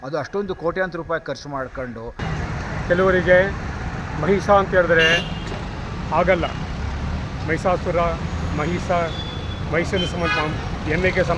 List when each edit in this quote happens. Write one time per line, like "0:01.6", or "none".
0:02.3